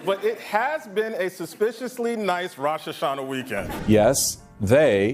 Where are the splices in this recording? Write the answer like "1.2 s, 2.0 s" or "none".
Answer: 3.8 s

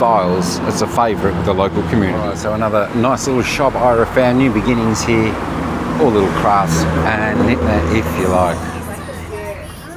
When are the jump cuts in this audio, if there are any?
none

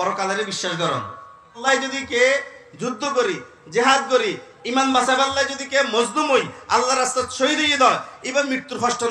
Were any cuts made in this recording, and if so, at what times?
1.6 s

